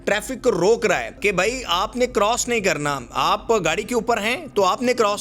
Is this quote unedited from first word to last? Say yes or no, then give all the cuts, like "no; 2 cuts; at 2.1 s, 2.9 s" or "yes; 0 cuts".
no; 1 cut; at 1.2 s